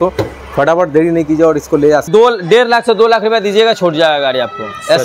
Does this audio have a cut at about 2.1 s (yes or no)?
yes